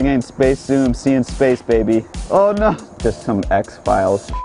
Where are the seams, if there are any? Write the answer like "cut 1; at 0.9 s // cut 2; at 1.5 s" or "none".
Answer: cut 1; at 2.2 s // cut 2; at 2.9 s